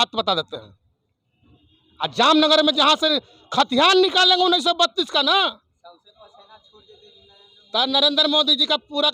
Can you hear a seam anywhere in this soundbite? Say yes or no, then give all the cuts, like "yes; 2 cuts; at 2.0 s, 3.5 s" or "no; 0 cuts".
no; 0 cuts